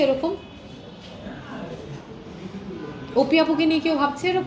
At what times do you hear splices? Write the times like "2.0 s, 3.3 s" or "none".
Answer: none